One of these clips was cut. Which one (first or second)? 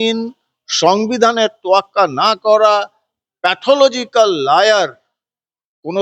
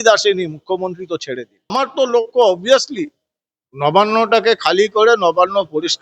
second